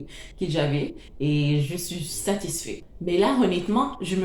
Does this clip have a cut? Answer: yes; 1 cut; at 2.8 s

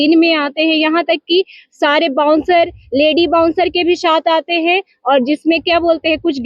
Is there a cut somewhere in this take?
no; 0 cuts

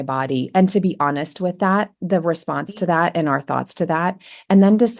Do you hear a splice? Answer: no; 0 cuts

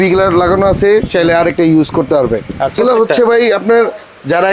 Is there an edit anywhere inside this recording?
yes; 1 cut; at 2.8 s

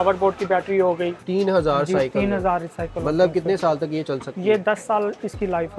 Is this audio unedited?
no; 1 cut; at 1.2 s

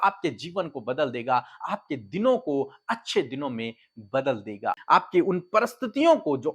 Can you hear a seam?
yes; 1 cut; at 4.8 s

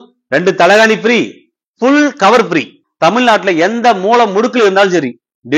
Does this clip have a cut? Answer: yes; 1 cut; at 2.8 s

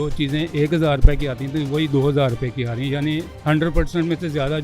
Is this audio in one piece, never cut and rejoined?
yes; 0 cuts

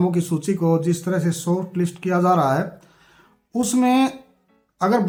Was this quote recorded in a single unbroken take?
yes; 0 cuts

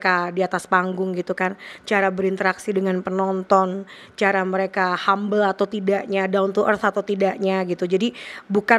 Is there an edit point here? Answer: no; 0 cuts

